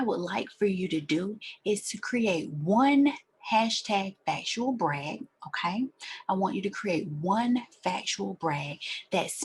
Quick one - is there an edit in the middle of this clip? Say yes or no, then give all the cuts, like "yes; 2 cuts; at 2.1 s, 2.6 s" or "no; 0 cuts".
no; 0 cuts